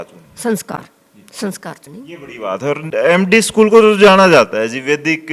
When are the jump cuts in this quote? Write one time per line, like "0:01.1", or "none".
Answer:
none